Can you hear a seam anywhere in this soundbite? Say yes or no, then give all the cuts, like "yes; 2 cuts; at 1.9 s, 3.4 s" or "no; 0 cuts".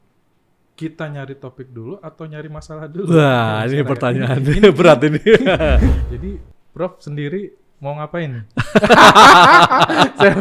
yes; 1 cut; at 6.1 s